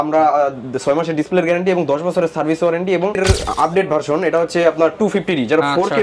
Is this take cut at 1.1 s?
no; 1 cut; at 3.2 s

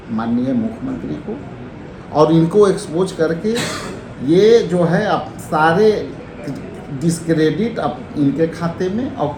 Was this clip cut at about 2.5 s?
no; 0 cuts

